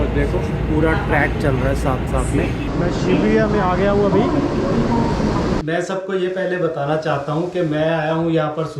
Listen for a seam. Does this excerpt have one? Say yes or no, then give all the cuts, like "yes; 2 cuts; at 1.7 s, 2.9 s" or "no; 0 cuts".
yes; 2 cuts; at 2.7 s, 5.6 s